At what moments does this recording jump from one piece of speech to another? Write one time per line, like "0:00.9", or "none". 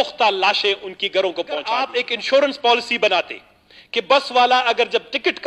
0:01.9